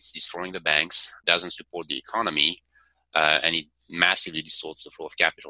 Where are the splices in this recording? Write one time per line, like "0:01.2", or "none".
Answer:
0:01.1